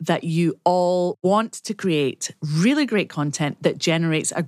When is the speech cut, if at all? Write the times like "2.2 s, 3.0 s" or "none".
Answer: 1.4 s